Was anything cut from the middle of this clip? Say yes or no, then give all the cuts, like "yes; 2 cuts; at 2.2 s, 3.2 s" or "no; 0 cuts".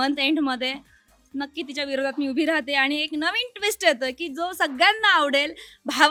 no; 0 cuts